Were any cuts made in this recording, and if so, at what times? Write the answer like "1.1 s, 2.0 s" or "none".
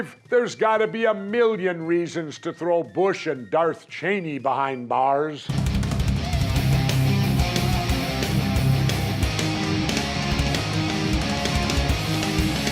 10.1 s